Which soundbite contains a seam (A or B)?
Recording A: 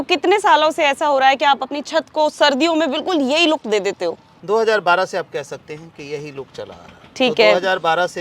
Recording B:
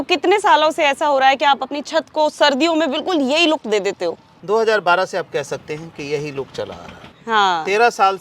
B